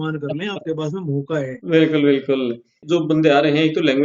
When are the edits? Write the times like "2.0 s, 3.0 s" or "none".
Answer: 2.8 s